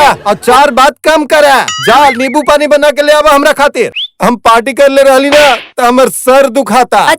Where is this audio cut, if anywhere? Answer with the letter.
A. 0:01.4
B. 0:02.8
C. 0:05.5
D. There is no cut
D